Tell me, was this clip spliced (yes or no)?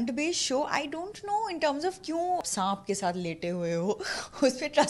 yes